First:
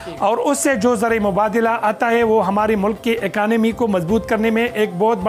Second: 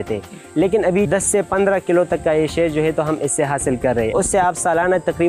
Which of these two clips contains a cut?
second; 2 cuts; at 1.1 s, 4.1 s

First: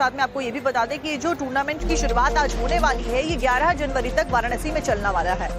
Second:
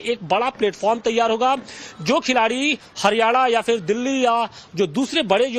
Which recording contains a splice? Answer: first; 1 cut; at 3.7 s

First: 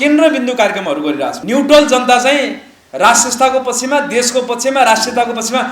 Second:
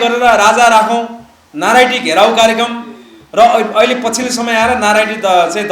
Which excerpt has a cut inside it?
first; 1 cut; at 1.4 s

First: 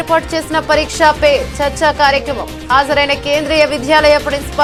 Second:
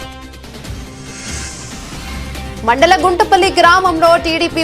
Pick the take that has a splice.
second; 1 cut; at 1.4 s

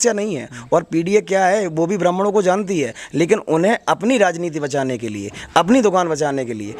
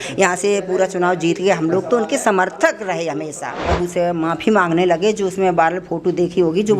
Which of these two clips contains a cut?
second; 1 cut; at 3.7 s

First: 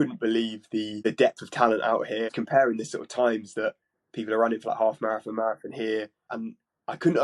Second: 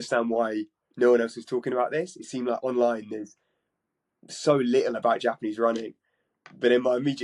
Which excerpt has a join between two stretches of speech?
first; 3 cuts; at 0.9 s, 2.4 s, 6.4 s

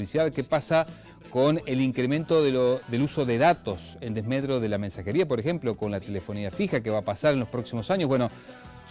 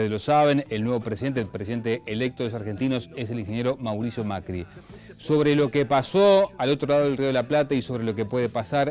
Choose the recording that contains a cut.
second; 1 cut; at 4.5 s

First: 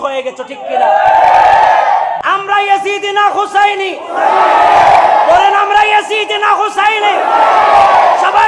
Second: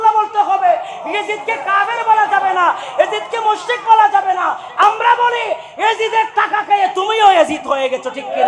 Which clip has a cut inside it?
first; 1 cut; at 2.2 s

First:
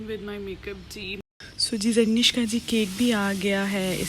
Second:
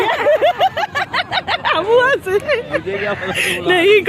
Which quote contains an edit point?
first; 1 cut; at 1.2 s

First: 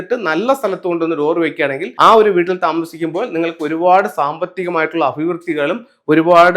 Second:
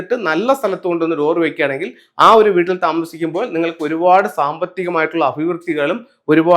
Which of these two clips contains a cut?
first; 1 cut; at 1.8 s

